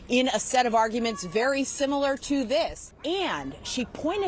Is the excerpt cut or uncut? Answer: cut